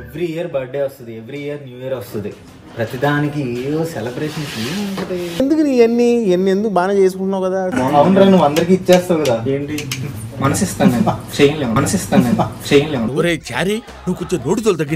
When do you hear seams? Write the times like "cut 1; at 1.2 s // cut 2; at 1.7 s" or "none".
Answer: cut 1; at 7.7 s